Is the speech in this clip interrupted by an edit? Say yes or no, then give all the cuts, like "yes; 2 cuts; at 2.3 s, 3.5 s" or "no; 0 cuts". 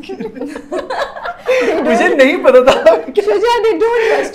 no; 0 cuts